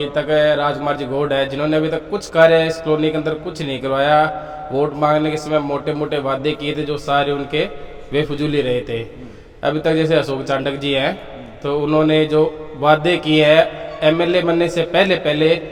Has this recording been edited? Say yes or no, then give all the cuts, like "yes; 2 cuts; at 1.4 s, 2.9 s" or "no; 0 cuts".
no; 0 cuts